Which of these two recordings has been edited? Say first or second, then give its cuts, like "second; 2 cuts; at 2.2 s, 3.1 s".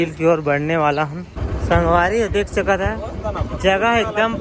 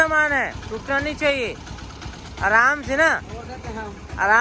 first; 1 cut; at 1.5 s